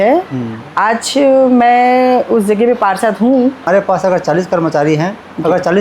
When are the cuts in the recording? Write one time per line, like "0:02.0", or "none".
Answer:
0:03.7